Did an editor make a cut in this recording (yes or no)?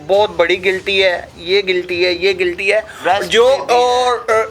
no